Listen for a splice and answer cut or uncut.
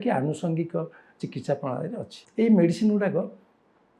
cut